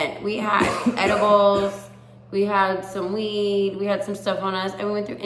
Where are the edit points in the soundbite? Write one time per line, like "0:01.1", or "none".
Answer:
none

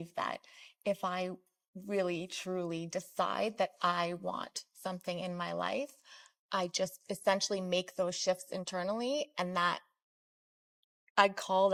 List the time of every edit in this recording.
none

